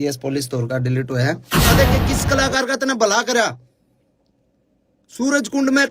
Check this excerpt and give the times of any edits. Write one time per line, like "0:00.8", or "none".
0:01.7